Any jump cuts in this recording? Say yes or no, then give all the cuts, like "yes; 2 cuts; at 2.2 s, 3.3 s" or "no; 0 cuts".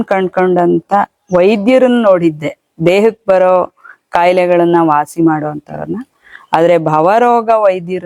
no; 0 cuts